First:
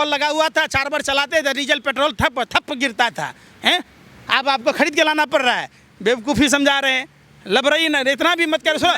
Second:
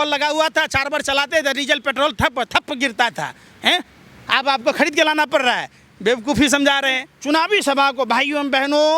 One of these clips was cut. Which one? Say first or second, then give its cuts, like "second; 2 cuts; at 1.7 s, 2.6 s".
second; 1 cut; at 7.1 s